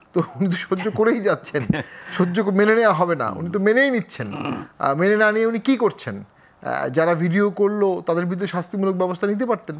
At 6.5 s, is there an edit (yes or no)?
no